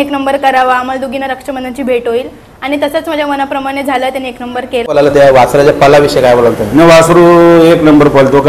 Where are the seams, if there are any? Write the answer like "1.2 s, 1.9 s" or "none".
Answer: 4.9 s